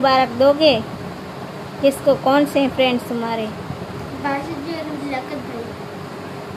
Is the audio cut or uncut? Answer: uncut